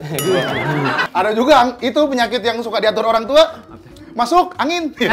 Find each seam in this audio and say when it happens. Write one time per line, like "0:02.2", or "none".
0:01.1